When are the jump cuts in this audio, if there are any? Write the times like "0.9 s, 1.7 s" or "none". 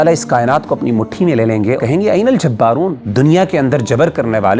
1.8 s, 3.0 s